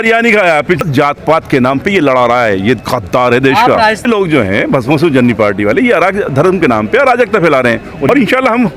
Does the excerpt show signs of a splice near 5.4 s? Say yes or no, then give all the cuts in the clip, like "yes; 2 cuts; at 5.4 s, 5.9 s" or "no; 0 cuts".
no; 3 cuts; at 0.8 s, 4.0 s, 8.1 s